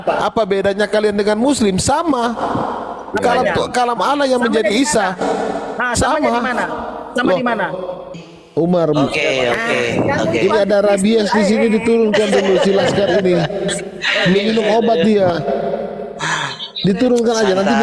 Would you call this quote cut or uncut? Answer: cut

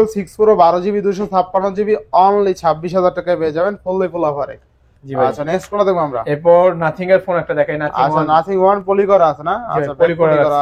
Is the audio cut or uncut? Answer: uncut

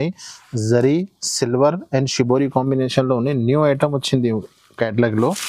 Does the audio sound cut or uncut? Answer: uncut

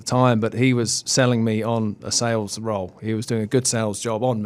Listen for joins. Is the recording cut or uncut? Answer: uncut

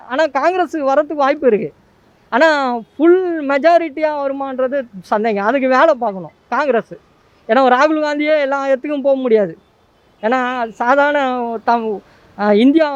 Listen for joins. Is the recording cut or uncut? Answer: uncut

